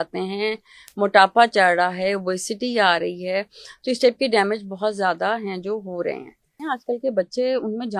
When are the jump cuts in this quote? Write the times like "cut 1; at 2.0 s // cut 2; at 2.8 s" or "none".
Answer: cut 1; at 6.6 s